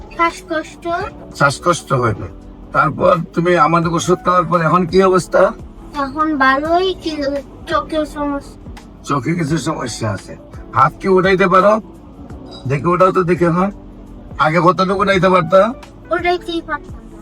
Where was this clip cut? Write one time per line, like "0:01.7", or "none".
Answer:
0:01.2